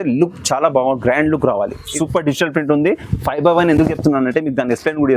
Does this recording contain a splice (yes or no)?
yes